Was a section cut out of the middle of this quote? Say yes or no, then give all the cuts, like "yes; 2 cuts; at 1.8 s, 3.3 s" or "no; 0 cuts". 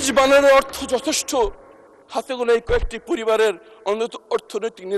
no; 0 cuts